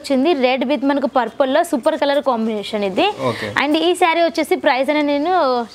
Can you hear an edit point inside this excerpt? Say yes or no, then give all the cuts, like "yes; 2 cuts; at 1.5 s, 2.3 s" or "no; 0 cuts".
no; 0 cuts